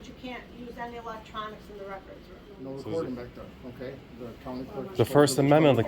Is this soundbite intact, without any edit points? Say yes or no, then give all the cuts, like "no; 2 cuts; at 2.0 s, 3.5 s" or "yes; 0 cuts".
no; 1 cut; at 2.5 s